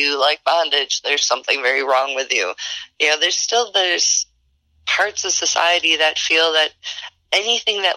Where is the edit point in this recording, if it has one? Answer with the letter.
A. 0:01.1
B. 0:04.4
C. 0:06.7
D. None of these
D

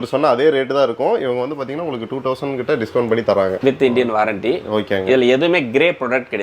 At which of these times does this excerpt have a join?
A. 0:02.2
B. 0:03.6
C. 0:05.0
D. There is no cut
D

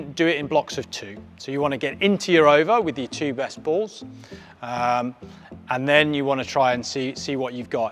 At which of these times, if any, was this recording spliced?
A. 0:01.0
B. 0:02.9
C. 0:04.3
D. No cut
D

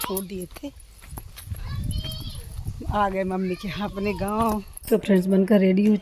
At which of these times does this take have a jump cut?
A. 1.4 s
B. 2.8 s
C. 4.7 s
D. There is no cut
C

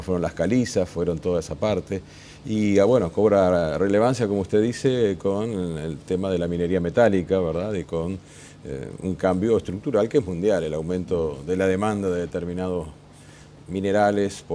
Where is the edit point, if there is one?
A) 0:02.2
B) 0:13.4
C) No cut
C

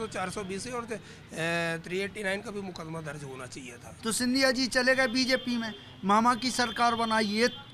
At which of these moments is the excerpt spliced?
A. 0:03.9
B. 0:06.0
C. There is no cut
A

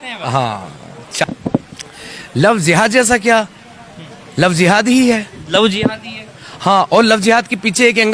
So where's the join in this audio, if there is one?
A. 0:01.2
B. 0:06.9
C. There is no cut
A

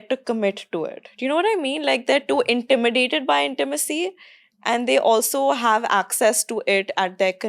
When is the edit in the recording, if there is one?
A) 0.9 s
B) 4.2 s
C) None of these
C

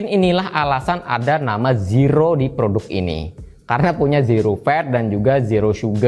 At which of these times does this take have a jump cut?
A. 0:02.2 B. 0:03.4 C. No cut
C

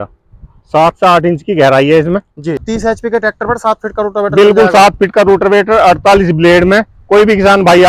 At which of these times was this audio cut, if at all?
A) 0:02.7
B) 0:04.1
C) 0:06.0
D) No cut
A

